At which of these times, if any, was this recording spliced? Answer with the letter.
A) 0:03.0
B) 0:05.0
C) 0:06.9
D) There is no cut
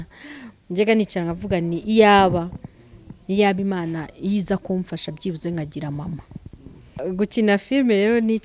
C